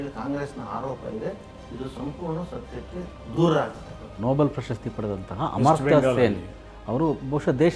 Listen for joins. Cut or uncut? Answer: cut